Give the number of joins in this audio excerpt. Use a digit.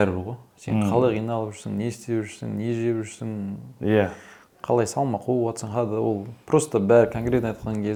0